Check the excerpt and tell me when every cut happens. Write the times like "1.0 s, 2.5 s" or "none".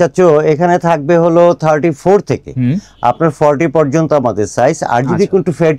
none